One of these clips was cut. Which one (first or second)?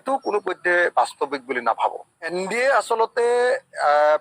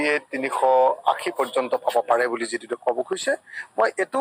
first